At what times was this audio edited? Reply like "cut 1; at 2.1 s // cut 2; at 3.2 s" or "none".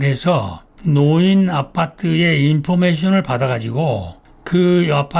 none